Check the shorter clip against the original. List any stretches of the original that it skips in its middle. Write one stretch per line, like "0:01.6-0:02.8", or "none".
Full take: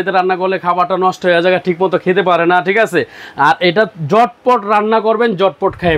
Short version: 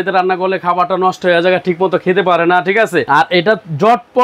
0:03.1-0:03.4